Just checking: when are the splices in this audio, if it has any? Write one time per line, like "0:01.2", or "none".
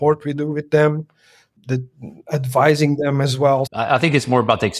0:01.5
0:03.7